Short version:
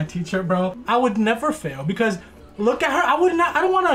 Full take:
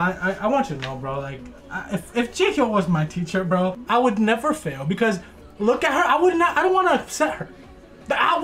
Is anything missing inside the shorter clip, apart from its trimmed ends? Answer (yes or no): no